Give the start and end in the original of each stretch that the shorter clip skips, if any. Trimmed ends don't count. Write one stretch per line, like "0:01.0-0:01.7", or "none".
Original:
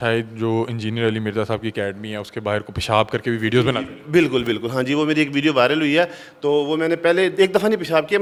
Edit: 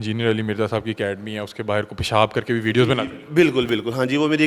none